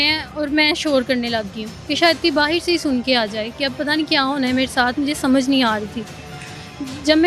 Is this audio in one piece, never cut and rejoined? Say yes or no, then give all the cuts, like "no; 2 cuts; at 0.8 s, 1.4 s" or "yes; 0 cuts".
yes; 0 cuts